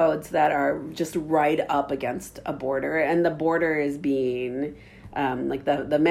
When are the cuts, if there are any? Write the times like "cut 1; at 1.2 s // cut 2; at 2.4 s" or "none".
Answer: none